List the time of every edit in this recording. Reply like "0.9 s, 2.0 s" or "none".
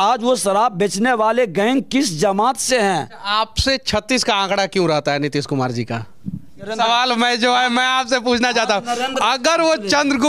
3.2 s, 6.7 s

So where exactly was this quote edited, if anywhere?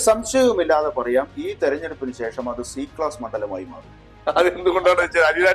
none

